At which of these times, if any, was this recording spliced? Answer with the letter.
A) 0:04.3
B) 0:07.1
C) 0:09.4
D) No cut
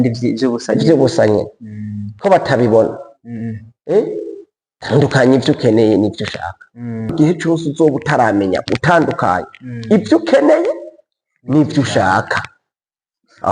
B